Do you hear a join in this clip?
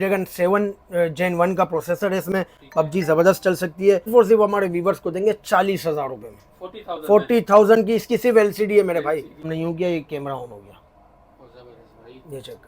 yes; 2 cuts; at 4.1 s, 9.4 s

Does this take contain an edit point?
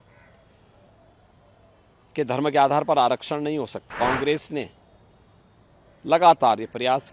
yes; 1 cut; at 3.9 s

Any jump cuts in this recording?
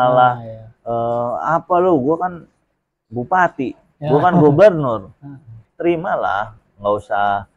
yes; 1 cut; at 5.6 s

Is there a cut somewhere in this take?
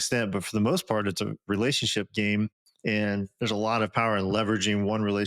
no; 0 cuts

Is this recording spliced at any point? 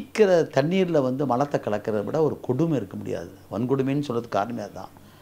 no; 0 cuts

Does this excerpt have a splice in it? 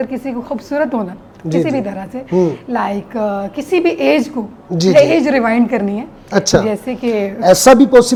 no; 0 cuts

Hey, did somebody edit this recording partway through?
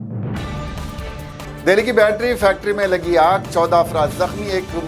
no; 0 cuts

